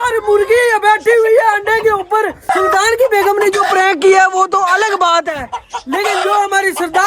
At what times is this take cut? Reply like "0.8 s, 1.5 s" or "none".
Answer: 2.5 s